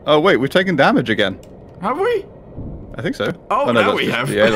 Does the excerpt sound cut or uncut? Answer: uncut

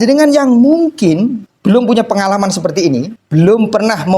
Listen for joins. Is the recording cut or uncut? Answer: cut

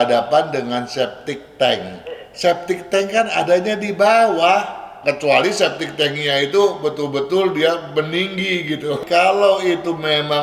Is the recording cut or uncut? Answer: cut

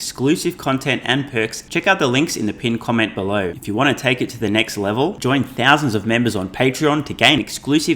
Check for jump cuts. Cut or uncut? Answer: cut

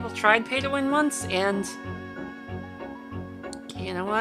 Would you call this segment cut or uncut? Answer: uncut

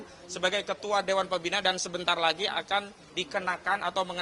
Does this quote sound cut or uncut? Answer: uncut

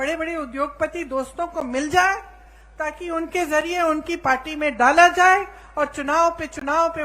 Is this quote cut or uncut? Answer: uncut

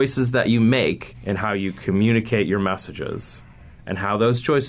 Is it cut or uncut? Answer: cut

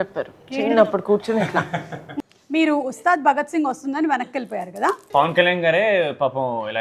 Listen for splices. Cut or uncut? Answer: cut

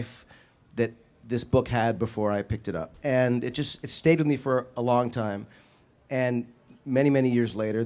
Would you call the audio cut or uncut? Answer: cut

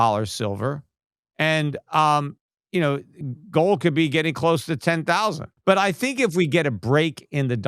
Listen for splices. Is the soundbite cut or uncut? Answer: cut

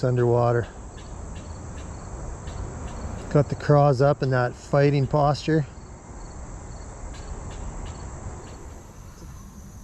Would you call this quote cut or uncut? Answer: cut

